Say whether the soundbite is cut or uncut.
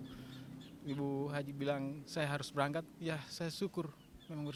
uncut